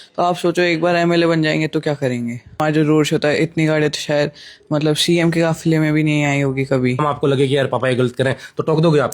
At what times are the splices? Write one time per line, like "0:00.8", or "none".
0:02.6
0:07.0